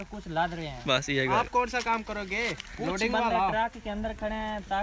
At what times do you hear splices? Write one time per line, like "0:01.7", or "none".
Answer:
0:01.3